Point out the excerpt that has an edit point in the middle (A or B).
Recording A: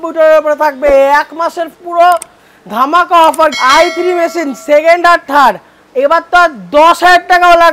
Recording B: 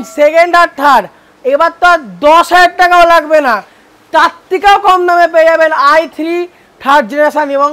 A